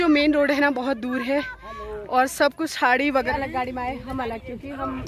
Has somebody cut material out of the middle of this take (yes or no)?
yes